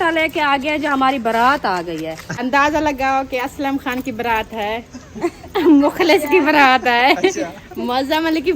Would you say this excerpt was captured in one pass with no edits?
no; 1 cut; at 2.4 s

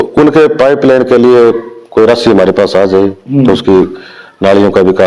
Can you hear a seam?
no; 0 cuts

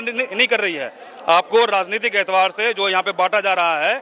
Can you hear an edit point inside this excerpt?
no; 0 cuts

